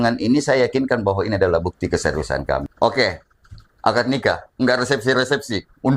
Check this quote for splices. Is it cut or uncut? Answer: cut